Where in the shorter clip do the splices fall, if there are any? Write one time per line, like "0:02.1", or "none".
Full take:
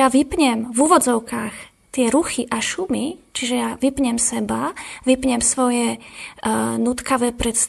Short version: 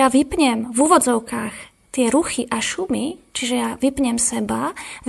none